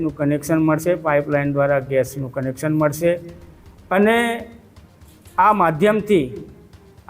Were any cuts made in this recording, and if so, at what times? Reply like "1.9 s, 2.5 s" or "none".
none